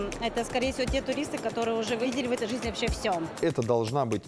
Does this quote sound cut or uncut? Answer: cut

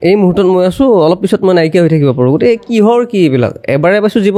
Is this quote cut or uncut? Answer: uncut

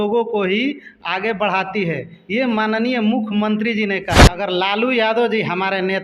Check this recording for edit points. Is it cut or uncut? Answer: cut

